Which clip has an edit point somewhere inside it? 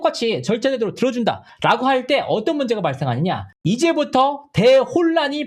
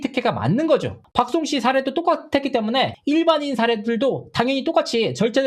second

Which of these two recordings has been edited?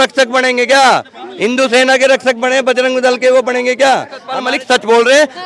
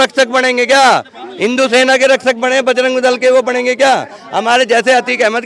first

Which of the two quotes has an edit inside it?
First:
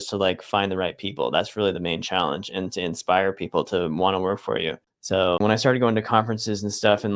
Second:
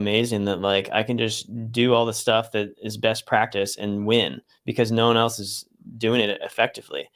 first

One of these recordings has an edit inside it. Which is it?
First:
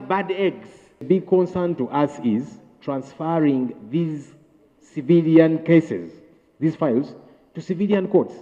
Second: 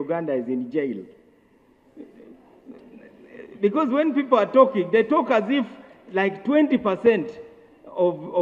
first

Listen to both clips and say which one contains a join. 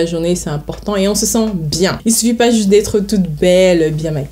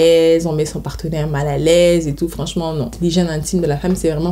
second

